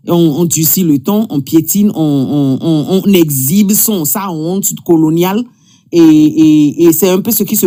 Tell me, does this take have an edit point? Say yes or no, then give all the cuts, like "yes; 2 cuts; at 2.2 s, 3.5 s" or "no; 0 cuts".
no; 0 cuts